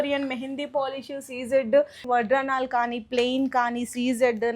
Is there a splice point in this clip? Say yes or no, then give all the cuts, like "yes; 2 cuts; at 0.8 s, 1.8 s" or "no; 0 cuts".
yes; 1 cut; at 2.0 s